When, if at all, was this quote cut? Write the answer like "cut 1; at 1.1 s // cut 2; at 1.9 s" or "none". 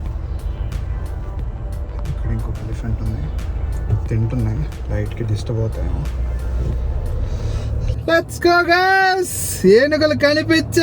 cut 1; at 8.0 s